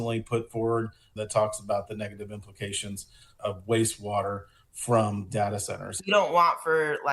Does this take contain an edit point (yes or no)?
yes